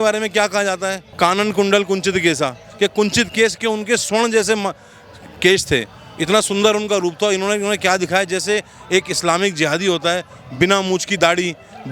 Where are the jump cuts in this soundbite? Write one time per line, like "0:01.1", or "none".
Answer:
0:01.0